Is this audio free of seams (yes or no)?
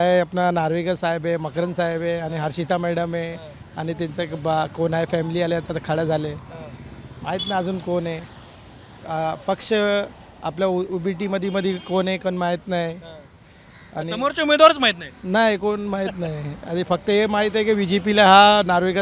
yes